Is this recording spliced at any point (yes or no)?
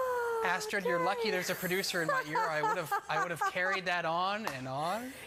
no